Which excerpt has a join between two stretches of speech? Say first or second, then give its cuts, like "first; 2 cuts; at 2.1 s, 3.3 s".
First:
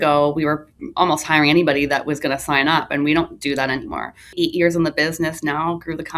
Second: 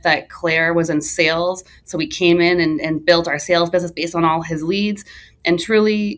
first; 1 cut; at 4.3 s